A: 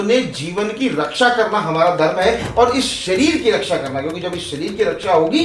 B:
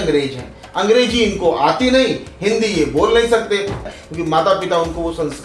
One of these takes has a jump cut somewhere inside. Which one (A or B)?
B